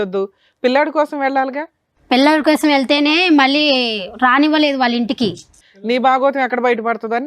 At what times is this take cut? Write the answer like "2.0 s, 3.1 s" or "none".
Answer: 5.5 s